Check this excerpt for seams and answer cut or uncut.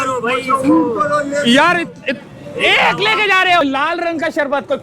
cut